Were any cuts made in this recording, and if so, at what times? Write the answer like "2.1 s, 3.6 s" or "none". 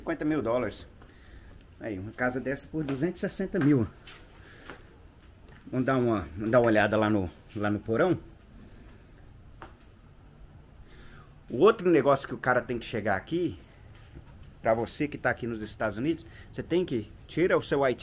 none